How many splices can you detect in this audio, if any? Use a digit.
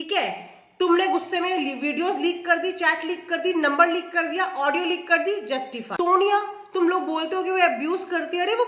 1